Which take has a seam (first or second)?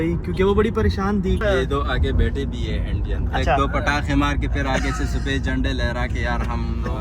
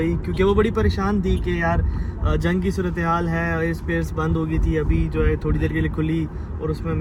first